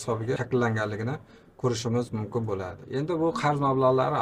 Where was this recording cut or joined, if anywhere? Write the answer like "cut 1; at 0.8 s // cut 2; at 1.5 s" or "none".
cut 1; at 2.8 s